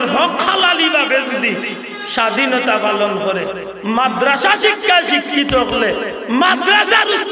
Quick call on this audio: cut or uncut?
uncut